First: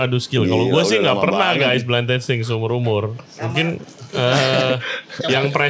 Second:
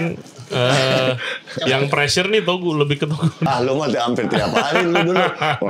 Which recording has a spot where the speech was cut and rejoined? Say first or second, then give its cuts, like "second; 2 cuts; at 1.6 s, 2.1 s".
second; 1 cut; at 3.5 s